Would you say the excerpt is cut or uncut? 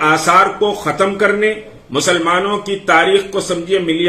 uncut